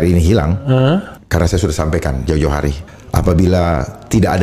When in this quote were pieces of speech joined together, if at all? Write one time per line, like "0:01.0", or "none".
0:01.2
0:02.9